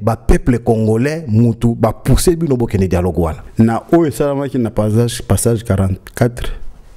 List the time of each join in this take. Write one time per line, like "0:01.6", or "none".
0:03.4